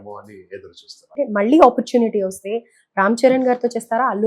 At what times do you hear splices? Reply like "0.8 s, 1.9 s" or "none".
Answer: 1.0 s

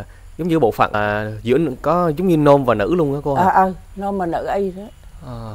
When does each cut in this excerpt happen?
1.0 s

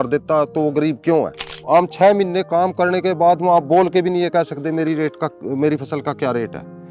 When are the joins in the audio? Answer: 1.5 s

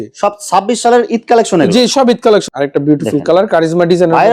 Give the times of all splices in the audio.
2.5 s

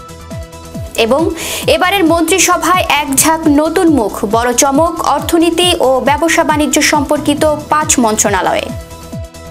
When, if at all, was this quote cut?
0.9 s, 8.7 s

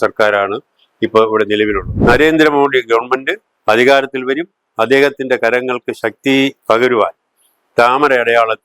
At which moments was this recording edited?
1.9 s

